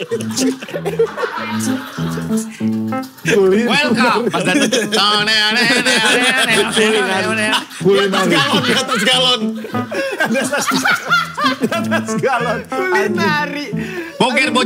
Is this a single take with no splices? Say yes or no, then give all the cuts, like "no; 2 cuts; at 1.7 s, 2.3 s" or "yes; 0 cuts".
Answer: yes; 0 cuts